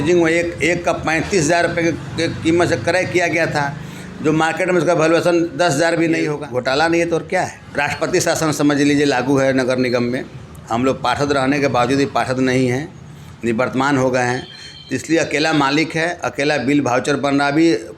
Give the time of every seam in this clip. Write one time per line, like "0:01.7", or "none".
0:06.4
0:07.6